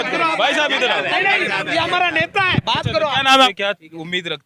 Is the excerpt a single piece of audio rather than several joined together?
no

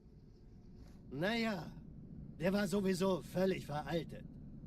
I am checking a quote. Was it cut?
yes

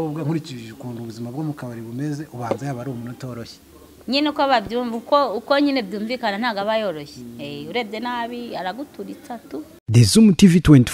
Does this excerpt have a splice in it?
yes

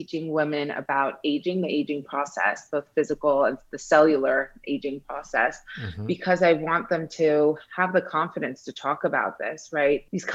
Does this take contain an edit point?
no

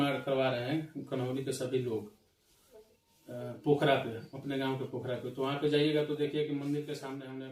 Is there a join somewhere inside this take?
no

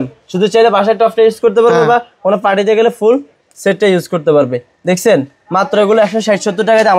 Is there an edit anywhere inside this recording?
no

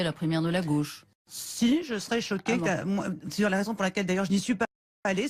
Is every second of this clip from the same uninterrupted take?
yes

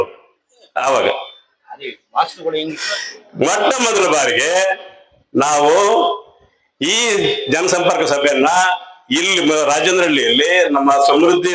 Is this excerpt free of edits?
no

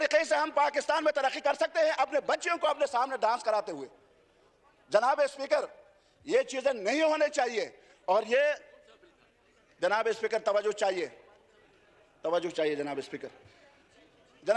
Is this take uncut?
yes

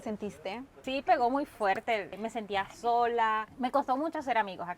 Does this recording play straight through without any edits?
no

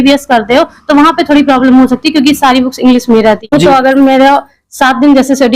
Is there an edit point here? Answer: yes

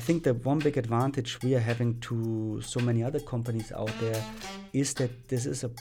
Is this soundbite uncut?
yes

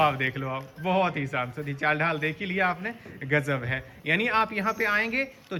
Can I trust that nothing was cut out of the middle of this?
yes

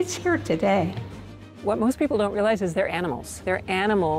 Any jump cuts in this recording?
yes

